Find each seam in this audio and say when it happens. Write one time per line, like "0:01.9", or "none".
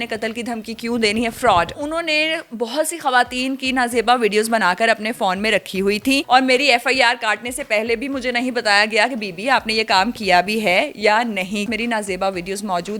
0:01.7
0:06.2
0:11.7